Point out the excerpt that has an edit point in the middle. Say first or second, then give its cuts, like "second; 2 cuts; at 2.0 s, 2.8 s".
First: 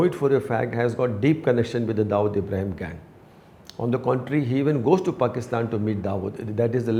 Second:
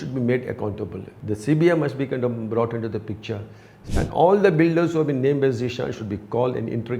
second; 2 cuts; at 1.1 s, 3.7 s